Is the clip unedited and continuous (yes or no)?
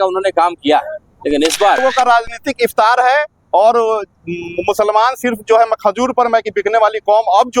no